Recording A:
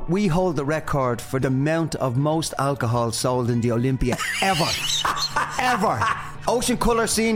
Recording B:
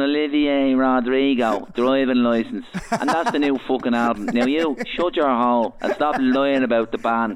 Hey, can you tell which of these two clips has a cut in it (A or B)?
A